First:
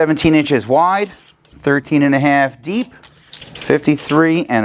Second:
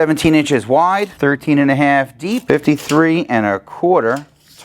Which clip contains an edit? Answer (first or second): second